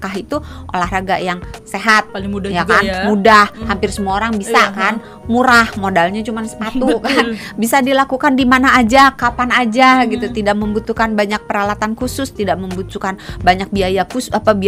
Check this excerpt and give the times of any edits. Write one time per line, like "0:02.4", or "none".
none